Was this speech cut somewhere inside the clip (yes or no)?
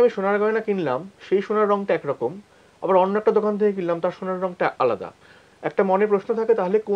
no